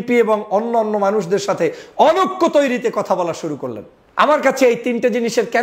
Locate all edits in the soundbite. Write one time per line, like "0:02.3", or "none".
0:04.0